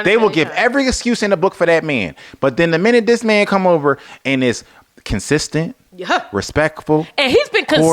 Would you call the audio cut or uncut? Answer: uncut